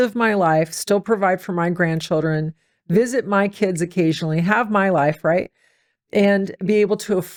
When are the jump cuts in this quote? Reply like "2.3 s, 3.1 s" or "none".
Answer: none